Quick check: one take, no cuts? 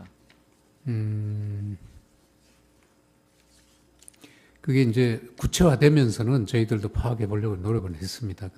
no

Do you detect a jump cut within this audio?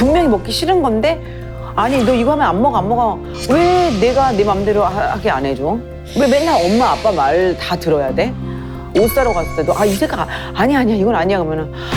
no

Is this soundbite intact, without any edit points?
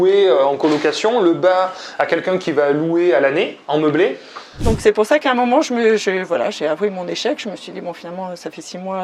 no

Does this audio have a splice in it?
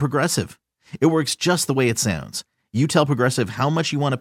no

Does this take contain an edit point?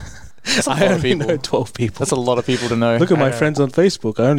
no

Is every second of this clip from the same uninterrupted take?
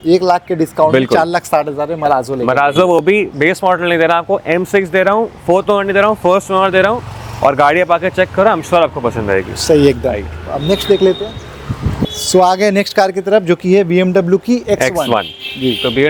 yes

